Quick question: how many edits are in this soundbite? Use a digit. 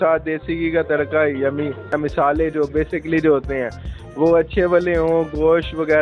1